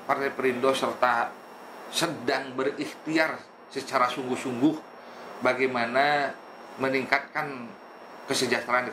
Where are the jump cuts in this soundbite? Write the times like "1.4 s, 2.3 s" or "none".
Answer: none